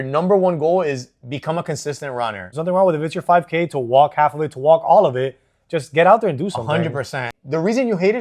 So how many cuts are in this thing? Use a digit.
2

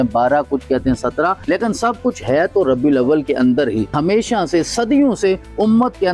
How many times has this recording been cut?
2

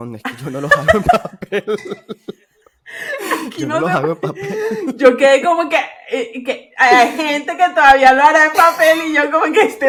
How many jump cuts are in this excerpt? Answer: 0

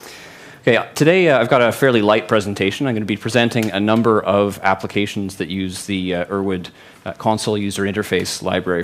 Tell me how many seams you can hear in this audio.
1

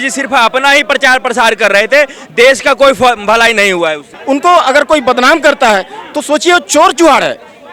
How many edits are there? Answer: 1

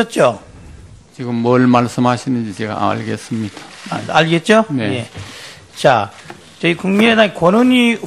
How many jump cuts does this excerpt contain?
1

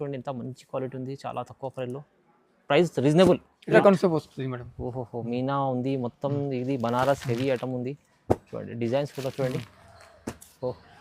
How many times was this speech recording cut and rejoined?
1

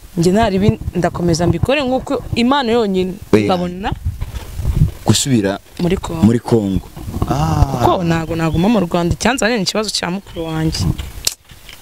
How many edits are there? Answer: 1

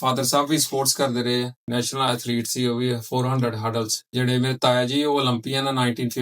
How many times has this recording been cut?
2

